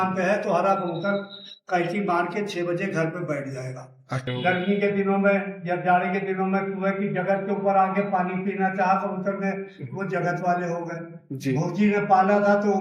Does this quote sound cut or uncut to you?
cut